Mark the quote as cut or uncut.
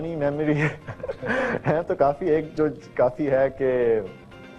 uncut